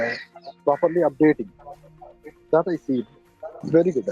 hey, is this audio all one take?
yes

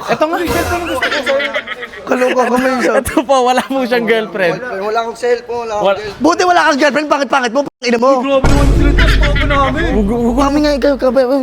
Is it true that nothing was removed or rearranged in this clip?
yes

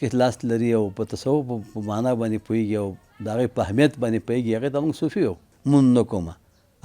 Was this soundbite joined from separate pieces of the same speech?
yes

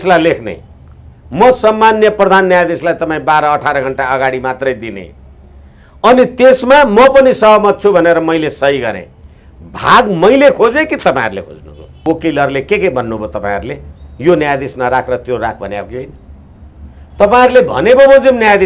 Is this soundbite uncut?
no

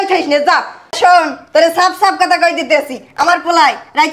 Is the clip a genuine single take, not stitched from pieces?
yes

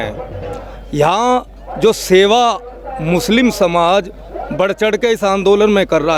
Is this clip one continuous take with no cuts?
yes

